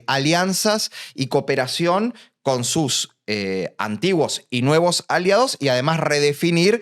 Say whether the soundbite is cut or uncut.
uncut